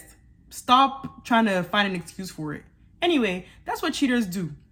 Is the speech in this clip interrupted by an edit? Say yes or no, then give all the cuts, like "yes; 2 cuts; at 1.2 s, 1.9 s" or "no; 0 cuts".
no; 0 cuts